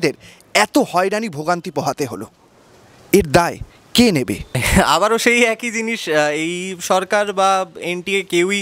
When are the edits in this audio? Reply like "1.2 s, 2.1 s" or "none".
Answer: none